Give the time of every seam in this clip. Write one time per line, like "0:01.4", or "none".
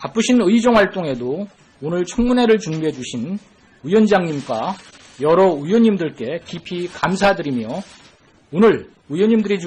0:08.4